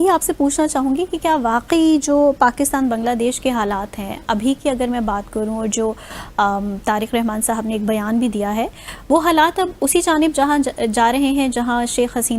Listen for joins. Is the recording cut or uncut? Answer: uncut